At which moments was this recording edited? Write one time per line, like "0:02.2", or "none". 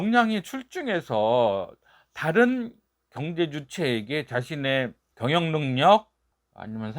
none